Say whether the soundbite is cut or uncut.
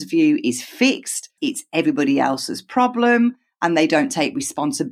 cut